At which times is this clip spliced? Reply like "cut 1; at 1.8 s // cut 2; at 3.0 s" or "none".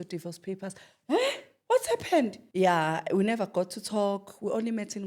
cut 1; at 2.4 s